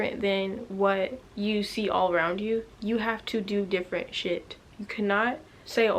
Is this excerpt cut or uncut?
cut